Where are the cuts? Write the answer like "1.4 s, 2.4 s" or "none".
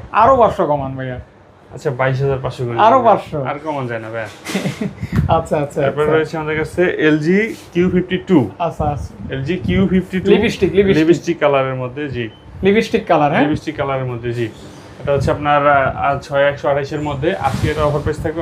none